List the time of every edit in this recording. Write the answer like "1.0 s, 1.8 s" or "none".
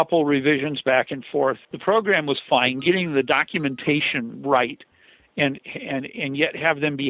1.7 s